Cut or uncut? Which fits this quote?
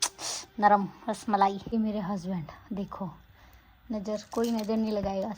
cut